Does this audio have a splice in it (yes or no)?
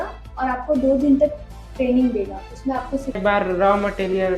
yes